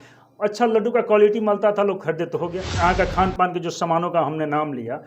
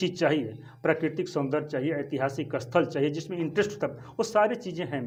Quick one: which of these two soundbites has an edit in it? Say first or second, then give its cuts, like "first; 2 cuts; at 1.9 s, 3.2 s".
first; 1 cut; at 2.6 s